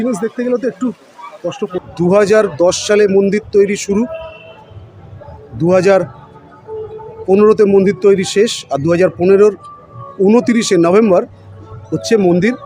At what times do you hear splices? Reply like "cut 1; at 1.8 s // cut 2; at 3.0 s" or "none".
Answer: cut 1; at 1.8 s